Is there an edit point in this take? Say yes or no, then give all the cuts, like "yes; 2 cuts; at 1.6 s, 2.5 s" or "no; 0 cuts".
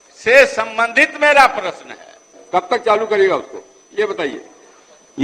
yes; 1 cut; at 2.3 s